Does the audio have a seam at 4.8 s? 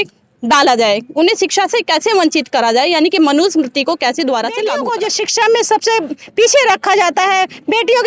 yes; 1 cut; at 4.8 s

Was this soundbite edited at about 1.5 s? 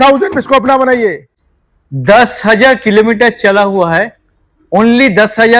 yes; 1 cut; at 1.5 s

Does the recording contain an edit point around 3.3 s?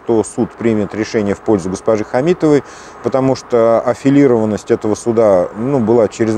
no; 0 cuts

